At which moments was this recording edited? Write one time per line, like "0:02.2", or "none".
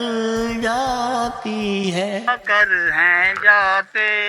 0:02.3